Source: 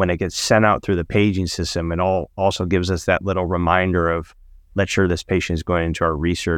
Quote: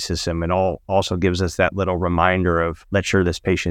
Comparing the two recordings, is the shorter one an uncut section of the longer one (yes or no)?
no